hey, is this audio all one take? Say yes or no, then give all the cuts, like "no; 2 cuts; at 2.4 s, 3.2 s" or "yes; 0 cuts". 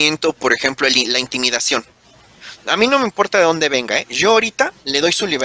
yes; 0 cuts